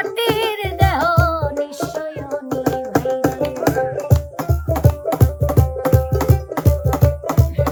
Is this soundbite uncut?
yes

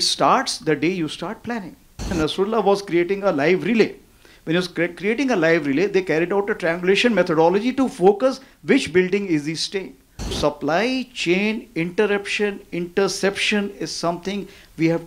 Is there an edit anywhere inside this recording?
yes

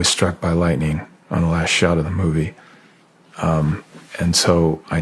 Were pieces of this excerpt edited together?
no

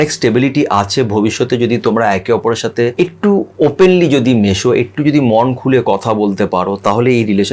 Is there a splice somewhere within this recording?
yes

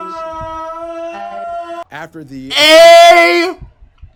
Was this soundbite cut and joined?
no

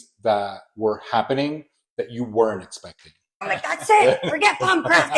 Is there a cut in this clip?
yes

